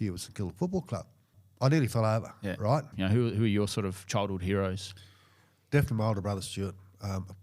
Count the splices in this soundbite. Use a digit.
2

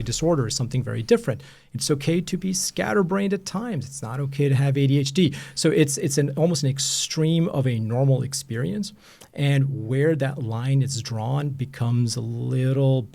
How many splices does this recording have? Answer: 0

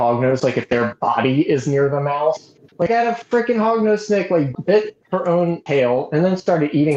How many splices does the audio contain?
2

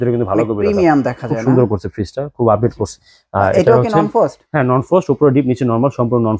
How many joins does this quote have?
1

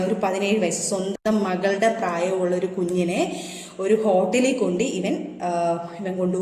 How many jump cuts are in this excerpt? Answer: 0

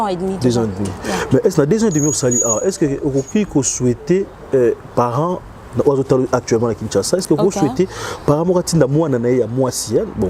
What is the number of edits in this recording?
0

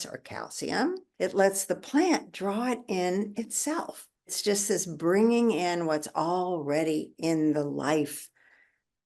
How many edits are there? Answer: 2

